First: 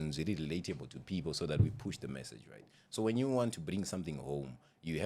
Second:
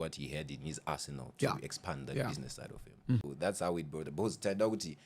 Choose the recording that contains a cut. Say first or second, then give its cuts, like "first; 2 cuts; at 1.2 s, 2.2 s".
second; 1 cut; at 3.2 s